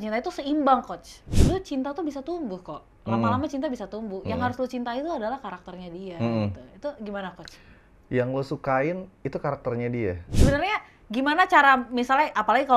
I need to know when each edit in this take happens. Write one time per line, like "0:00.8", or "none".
0:01.3
0:10.3